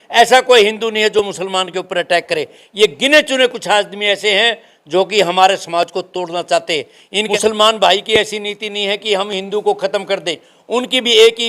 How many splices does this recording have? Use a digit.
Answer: 1